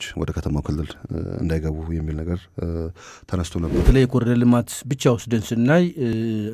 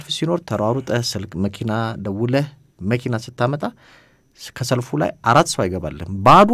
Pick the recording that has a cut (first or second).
first